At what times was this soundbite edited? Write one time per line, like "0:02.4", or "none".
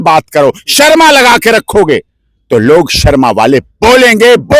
none